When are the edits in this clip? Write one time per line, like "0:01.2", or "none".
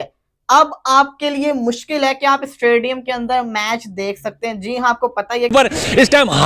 0:05.5